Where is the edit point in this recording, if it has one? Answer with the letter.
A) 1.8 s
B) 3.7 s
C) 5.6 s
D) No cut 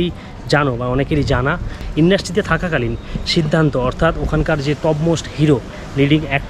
A